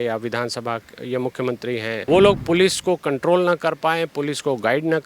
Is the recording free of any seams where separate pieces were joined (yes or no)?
no